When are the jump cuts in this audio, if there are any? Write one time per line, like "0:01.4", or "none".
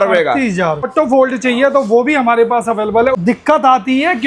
0:00.9
0:03.2